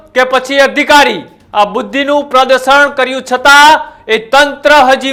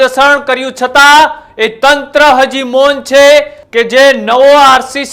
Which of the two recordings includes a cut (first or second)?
second